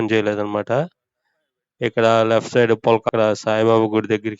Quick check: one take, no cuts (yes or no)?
no